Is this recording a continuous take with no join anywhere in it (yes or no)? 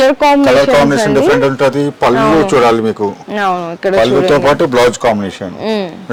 yes